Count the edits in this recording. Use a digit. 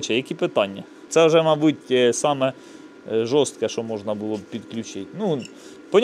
1